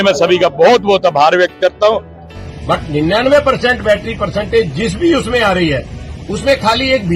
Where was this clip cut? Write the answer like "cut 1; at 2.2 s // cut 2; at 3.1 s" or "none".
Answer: cut 1; at 2.3 s